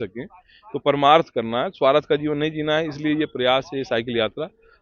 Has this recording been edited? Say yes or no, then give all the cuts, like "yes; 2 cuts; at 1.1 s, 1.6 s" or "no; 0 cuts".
no; 0 cuts